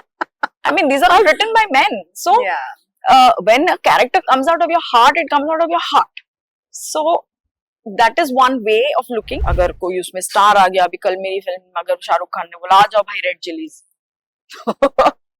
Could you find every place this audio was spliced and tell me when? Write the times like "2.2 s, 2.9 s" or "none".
9.4 s